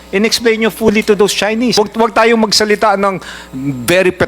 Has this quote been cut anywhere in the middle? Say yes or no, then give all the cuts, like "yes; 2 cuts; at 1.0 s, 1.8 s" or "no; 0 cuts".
yes; 1 cut; at 1.7 s